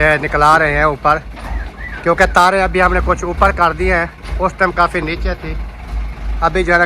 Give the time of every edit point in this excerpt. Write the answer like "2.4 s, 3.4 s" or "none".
none